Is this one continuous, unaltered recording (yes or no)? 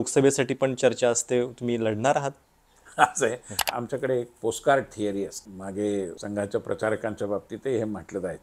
no